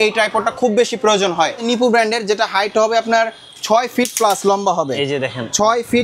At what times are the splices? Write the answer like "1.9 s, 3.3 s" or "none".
1.6 s